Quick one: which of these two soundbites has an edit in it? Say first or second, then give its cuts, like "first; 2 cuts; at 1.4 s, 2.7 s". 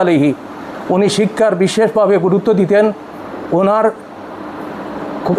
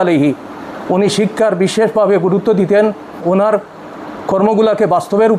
second; 1 cut; at 3.2 s